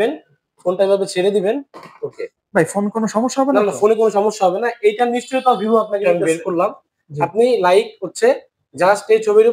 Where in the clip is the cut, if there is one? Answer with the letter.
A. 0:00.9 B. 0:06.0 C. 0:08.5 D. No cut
B